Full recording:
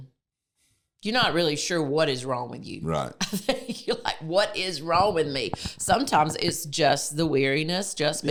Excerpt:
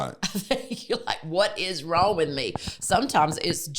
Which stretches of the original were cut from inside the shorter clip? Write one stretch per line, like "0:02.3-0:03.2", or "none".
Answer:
none

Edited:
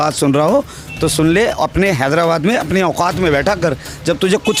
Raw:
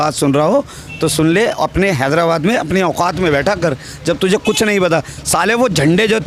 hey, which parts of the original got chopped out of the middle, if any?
none

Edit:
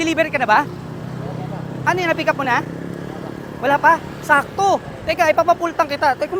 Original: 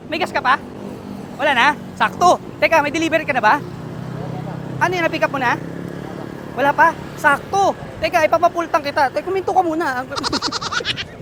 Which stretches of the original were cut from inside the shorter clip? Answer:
none

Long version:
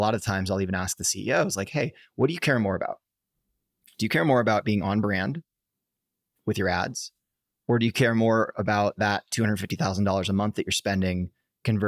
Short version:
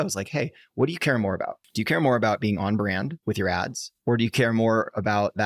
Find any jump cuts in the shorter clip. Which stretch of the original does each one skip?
0:03.0-0:03.9
0:05.4-0:06.4
0:07.1-0:07.5

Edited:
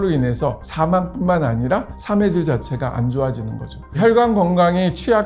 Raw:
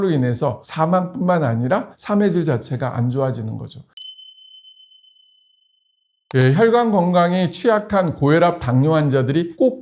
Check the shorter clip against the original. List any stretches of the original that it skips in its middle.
0:04.0-0:06.5

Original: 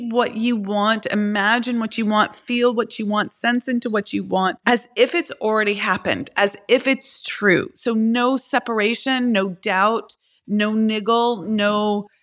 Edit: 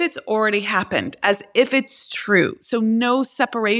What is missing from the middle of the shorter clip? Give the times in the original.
none

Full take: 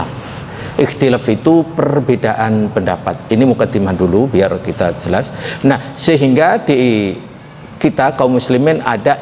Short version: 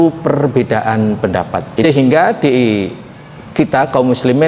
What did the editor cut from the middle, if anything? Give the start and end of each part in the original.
0:03.4-0:06.1

